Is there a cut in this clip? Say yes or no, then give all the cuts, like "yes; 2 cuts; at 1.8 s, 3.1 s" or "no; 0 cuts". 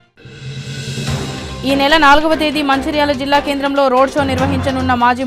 yes; 1 cut; at 1.2 s